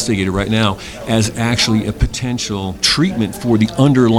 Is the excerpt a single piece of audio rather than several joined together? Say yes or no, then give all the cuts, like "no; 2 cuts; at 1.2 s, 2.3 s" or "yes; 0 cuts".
no; 1 cut; at 2.8 s